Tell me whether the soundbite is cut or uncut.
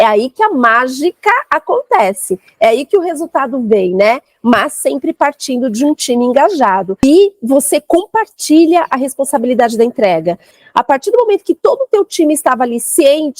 cut